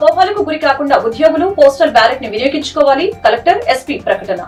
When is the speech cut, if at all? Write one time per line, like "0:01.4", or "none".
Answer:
none